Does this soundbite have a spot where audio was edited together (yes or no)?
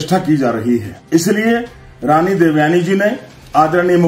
yes